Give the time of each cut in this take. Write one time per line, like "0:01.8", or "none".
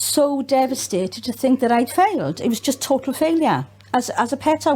none

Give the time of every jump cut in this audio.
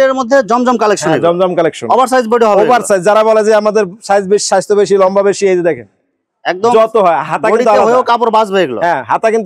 none

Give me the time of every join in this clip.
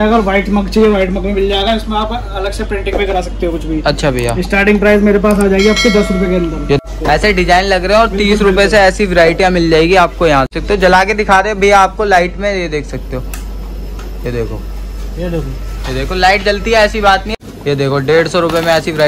0:06.8
0:10.5
0:17.3

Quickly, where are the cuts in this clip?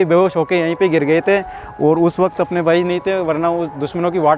none

